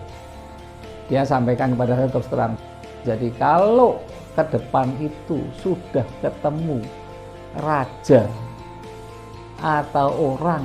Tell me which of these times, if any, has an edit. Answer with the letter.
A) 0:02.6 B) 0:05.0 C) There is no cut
A